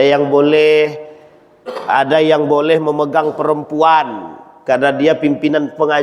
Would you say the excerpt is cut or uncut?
uncut